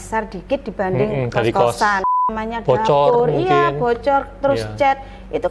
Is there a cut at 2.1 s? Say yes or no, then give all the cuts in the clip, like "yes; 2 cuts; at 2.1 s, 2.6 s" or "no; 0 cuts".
yes; 1 cut; at 2.1 s